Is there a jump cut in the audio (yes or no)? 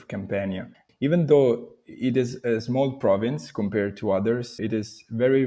yes